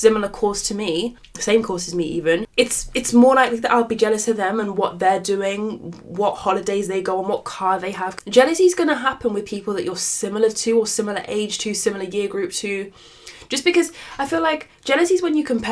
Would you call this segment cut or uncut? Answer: uncut